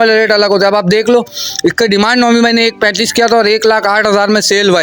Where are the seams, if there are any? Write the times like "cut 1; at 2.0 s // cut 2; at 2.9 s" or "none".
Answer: none